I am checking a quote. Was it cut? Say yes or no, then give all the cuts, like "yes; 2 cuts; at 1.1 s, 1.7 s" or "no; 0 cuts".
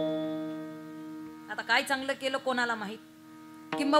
no; 0 cuts